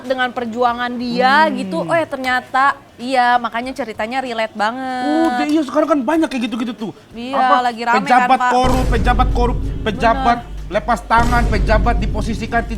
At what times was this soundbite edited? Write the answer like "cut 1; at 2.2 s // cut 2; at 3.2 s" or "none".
cut 1; at 2.9 s